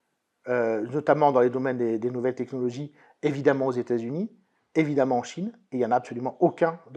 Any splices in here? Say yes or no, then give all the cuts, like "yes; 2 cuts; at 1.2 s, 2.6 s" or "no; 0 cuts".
no; 0 cuts